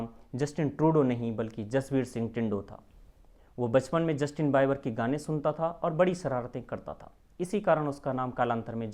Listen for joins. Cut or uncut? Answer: uncut